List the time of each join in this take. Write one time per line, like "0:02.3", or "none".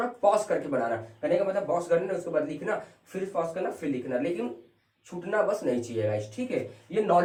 none